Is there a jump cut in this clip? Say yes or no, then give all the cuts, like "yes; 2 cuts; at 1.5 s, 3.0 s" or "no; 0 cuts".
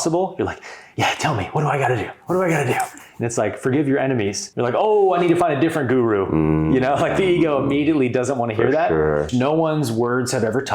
yes; 2 cuts; at 4.4 s, 9.3 s